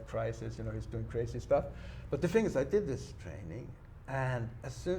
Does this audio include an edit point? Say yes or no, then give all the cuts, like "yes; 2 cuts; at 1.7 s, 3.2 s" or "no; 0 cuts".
no; 0 cuts